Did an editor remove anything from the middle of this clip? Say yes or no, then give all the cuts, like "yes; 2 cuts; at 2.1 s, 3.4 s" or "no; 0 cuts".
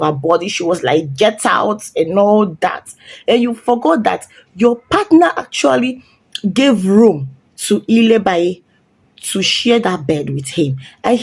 no; 0 cuts